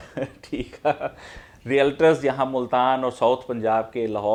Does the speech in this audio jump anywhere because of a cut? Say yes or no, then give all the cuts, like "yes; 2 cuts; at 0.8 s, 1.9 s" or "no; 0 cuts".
no; 0 cuts